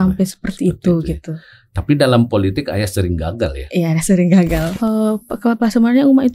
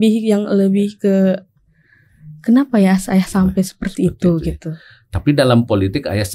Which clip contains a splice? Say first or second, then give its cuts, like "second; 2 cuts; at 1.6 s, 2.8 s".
first; 1 cut; at 4.7 s